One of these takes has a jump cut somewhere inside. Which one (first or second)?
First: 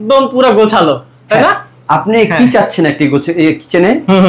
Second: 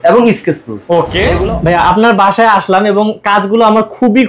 second